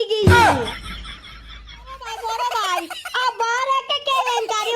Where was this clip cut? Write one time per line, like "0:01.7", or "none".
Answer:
0:02.0